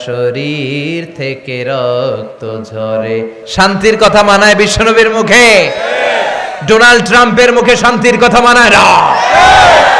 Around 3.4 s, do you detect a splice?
yes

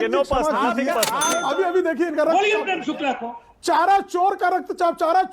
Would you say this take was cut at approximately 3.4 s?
no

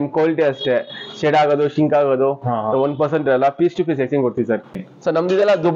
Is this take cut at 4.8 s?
yes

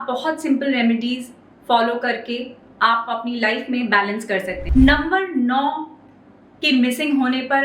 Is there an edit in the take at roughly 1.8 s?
no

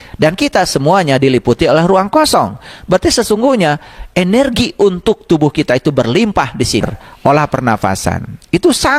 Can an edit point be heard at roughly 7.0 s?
yes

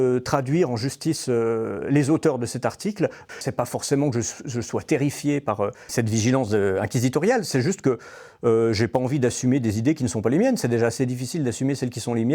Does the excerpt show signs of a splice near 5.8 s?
yes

